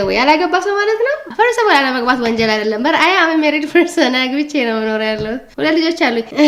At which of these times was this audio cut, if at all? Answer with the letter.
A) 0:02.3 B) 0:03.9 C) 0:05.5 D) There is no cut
D